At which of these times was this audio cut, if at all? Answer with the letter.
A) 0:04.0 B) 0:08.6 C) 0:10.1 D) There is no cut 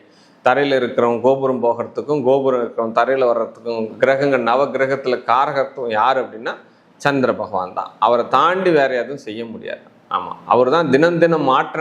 D